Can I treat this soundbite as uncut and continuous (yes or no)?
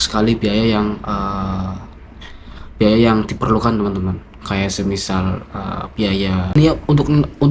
no